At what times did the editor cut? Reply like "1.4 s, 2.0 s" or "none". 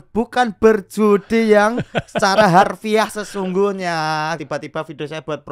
4.4 s